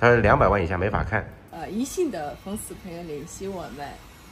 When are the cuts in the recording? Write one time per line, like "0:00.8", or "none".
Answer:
0:01.5